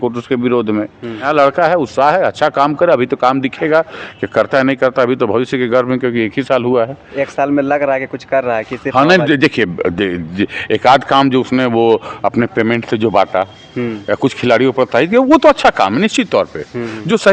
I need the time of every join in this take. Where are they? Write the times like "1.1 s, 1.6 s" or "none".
1.2 s